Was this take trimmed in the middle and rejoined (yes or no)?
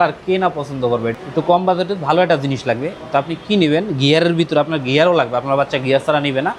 yes